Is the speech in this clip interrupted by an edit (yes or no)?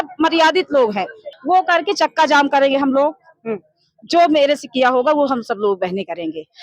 yes